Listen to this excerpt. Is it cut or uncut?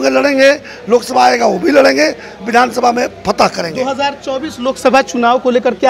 uncut